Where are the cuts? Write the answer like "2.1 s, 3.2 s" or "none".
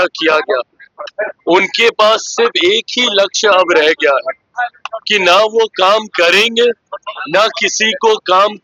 none

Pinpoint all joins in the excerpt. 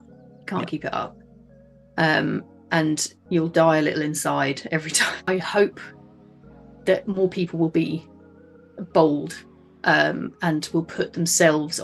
5.2 s

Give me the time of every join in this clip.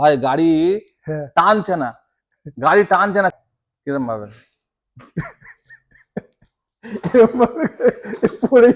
3.3 s

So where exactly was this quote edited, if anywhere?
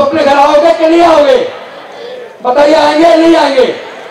none

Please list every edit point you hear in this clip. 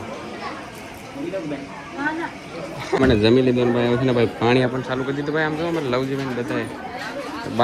3.0 s

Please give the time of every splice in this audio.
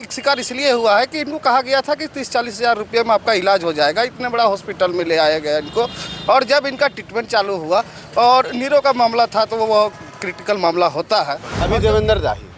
11.5 s

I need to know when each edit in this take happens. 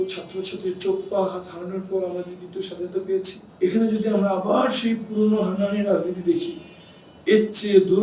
3.4 s

